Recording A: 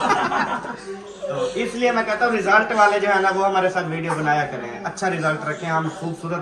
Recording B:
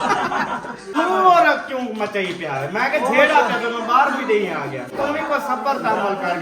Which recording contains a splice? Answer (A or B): B